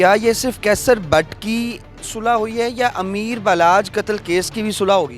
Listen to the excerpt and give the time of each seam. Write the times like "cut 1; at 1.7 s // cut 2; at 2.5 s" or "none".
none